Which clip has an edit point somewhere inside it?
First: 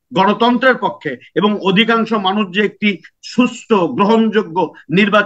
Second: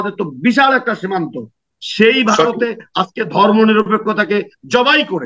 second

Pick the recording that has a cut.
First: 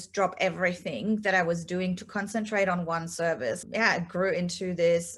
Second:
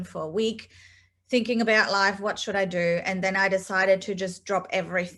first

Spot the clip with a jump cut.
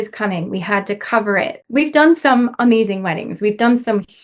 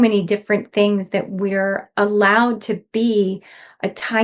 first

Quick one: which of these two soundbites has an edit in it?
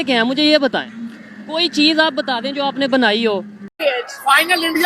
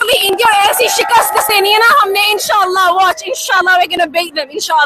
first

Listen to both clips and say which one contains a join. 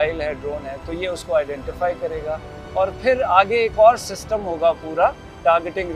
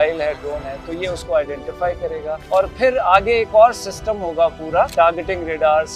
second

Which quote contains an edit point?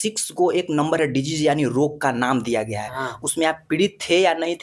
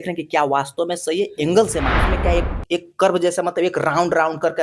second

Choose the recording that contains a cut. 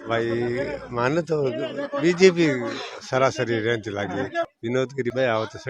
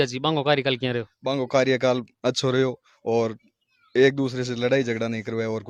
first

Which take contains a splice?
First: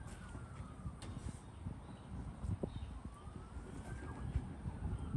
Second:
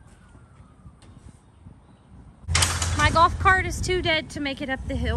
second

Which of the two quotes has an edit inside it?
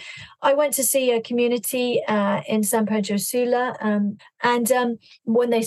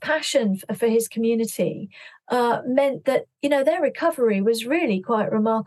first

